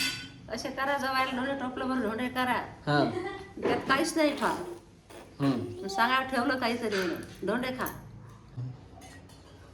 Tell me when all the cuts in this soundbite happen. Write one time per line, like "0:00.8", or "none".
0:08.4